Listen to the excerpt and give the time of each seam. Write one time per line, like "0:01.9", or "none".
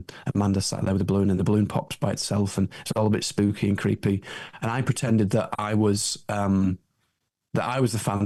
none